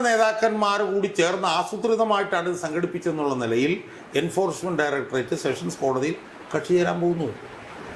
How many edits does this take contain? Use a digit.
0